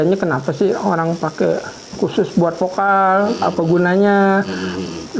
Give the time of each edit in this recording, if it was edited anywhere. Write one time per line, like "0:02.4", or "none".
none